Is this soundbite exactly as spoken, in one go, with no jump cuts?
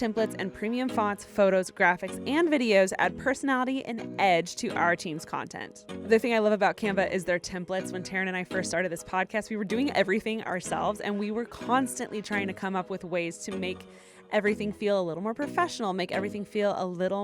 no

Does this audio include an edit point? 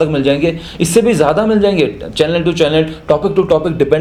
no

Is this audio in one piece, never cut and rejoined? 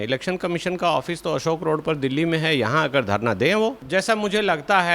no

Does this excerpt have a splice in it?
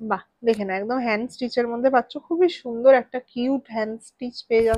no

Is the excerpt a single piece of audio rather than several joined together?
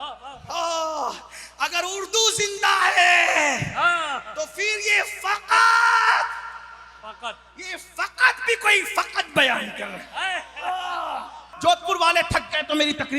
no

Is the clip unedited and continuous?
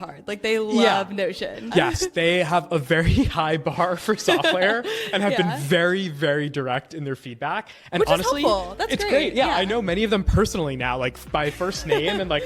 no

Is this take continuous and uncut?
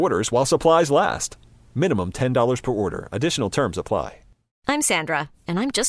no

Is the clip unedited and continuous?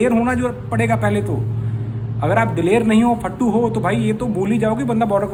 yes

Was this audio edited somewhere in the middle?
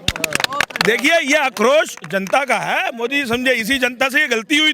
no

